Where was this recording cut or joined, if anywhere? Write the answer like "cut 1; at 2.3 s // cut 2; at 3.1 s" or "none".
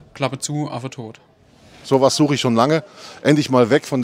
cut 1; at 1.7 s

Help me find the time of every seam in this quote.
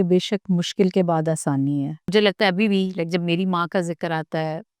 cut 1; at 2.1 s

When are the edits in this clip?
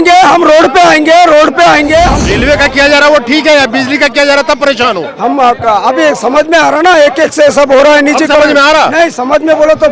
cut 1; at 2.2 s

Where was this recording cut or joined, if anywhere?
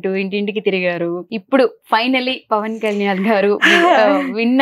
cut 1; at 1.3 s

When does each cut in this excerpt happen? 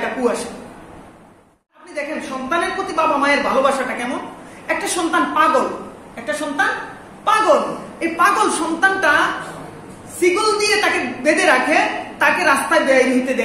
cut 1; at 1.9 s

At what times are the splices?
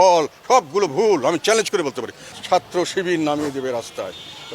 cut 1; at 2.3 s

